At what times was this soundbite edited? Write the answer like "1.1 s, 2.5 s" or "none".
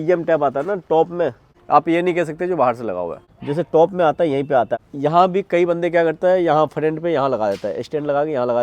1.4 s, 3.2 s, 4.8 s